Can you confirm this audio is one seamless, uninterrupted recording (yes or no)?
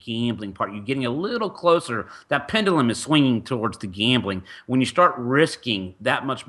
yes